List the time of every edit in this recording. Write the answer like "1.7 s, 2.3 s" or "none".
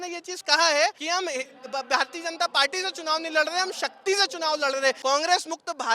1.0 s, 5.0 s